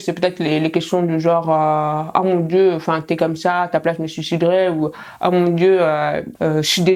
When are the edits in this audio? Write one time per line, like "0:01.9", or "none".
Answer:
none